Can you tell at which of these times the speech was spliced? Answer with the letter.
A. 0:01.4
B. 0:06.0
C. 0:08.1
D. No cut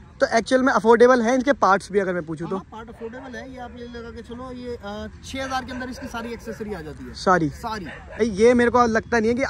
C